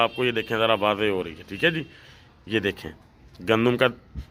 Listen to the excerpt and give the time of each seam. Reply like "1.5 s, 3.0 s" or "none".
none